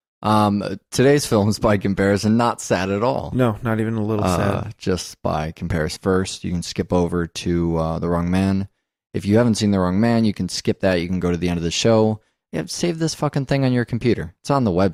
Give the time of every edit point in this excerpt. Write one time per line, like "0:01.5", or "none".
none

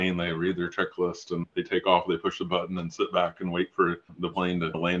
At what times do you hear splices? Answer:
none

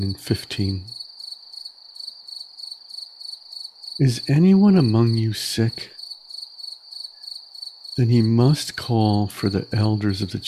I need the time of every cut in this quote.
0:01.0
0:04.0
0:06.0
0:07.9

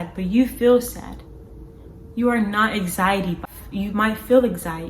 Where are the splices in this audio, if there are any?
0:03.4

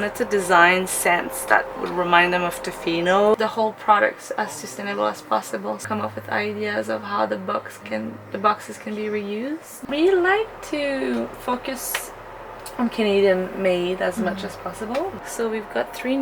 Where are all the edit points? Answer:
0:01.8
0:03.3
0:05.8
0:09.7
0:15.2

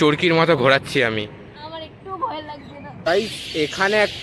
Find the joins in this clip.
0:03.1

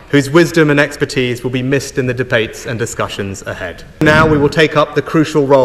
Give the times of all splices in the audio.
0:04.0

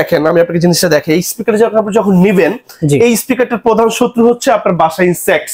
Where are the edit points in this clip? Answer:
none

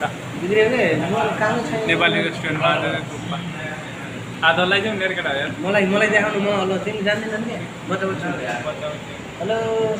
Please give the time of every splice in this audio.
none

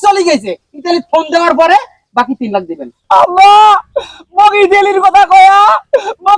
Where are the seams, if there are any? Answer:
0:02.9

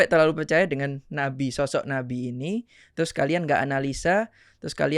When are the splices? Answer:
none

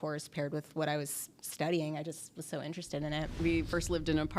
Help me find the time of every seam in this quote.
0:03.2

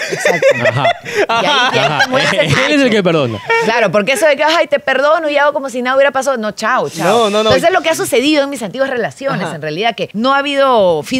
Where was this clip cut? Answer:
none

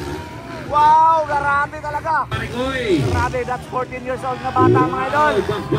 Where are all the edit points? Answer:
0:02.4

